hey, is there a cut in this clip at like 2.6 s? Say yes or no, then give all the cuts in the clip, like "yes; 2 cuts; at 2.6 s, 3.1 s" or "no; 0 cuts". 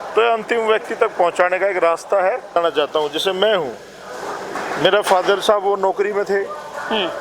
yes; 1 cut; at 2.6 s